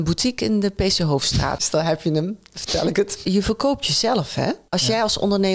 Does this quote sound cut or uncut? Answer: cut